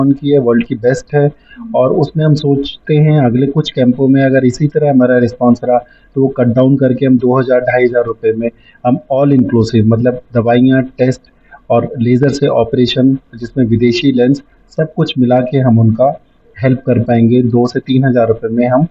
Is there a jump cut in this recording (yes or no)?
no